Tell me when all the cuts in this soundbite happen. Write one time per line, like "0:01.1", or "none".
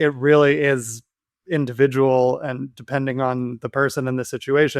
none